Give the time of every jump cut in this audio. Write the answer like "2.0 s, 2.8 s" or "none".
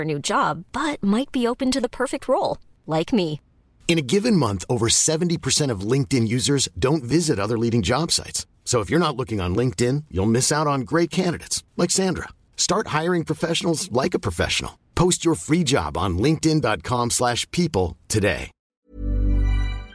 18.8 s